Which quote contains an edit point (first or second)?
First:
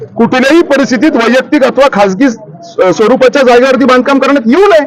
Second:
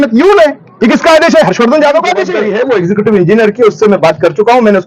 second